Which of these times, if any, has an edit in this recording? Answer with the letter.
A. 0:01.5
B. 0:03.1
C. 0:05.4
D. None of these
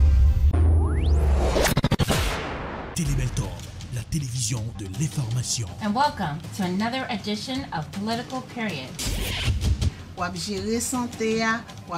A